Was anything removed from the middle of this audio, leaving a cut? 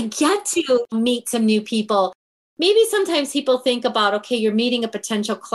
yes; 2 cuts; at 0.9 s, 2.4 s

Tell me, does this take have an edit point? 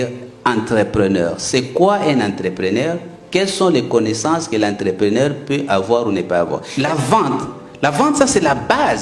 yes; 1 cut; at 6.7 s

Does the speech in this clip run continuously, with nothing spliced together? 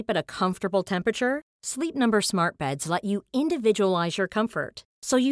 yes; 0 cuts

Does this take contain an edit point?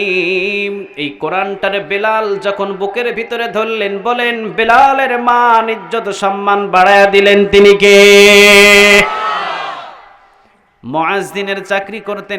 no; 0 cuts

